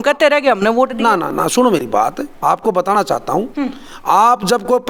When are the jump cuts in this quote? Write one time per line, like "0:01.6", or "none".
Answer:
none